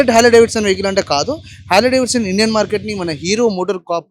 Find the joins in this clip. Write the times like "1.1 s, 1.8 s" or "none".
none